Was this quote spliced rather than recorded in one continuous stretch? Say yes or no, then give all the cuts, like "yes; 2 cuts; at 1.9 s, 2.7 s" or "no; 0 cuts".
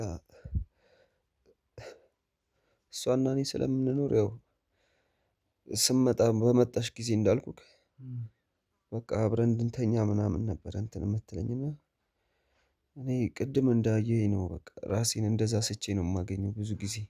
no; 0 cuts